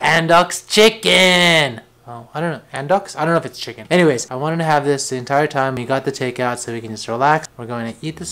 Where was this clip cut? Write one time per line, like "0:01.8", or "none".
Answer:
0:05.8